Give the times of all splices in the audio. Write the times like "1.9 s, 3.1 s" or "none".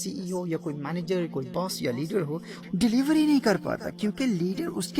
2.6 s